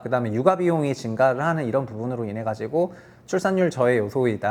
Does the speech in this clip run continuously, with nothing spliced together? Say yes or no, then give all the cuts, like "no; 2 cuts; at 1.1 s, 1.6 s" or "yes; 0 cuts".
yes; 0 cuts